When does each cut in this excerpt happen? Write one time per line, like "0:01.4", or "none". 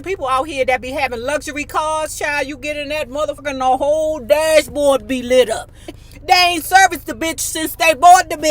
0:03.4
0:06.0